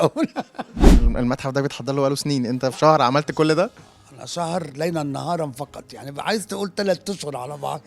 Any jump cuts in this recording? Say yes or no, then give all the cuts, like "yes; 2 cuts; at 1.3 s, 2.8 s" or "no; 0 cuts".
yes; 1 cut; at 1.0 s